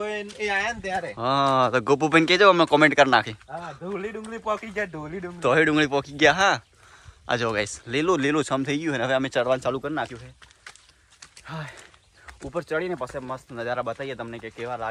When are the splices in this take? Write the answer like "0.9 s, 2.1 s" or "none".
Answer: none